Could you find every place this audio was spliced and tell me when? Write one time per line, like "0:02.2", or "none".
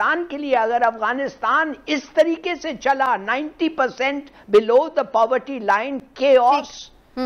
none